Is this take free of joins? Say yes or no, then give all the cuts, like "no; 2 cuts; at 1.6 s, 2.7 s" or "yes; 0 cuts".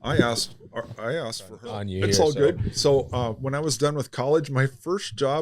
no; 1 cut; at 1.9 s